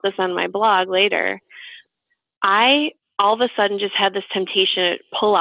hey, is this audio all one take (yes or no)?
no